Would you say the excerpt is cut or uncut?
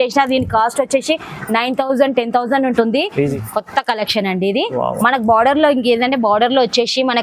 cut